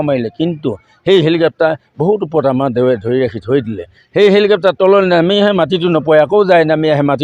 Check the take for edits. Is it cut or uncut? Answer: uncut